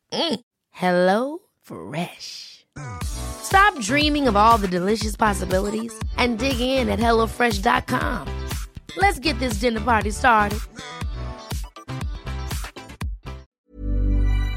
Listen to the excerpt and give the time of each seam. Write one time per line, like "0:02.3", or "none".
0:13.5